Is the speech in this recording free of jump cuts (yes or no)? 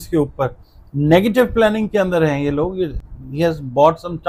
yes